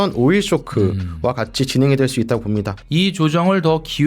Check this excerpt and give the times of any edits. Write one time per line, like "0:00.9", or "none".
0:02.8